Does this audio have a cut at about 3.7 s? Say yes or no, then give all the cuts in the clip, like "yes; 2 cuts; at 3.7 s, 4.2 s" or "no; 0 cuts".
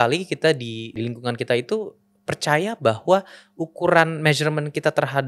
no; 1 cut; at 1.0 s